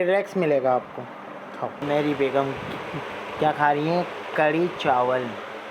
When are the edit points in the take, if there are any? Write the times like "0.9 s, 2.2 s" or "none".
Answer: 1.8 s